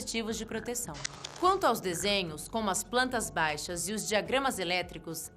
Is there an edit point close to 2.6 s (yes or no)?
yes